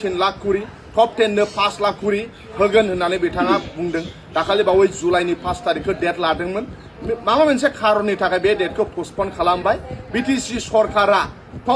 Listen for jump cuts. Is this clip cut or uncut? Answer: uncut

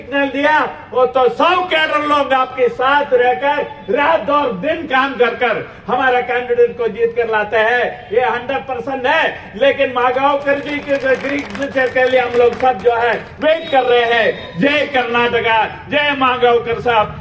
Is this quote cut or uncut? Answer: uncut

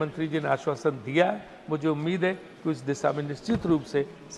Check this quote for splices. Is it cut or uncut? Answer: uncut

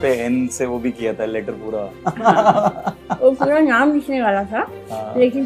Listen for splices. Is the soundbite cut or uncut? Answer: cut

